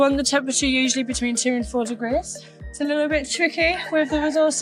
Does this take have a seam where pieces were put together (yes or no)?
no